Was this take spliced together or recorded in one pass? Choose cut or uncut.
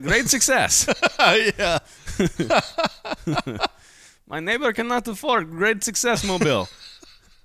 uncut